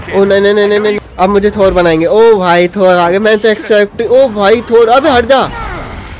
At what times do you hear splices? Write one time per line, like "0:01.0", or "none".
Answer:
0:01.0